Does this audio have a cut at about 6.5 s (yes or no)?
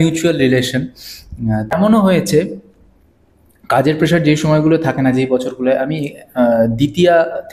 no